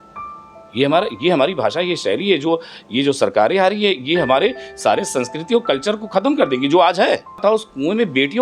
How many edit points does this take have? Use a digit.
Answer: 1